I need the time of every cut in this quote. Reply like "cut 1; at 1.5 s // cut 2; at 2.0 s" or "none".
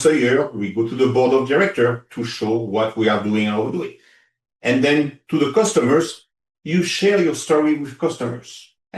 none